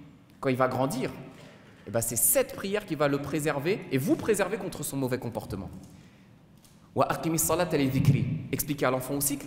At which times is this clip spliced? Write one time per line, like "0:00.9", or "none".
none